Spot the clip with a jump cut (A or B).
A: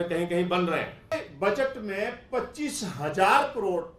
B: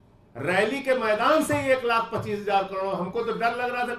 A